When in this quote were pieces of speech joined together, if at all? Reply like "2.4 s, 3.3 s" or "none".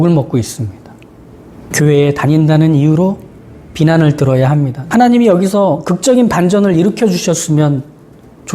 1.7 s, 4.8 s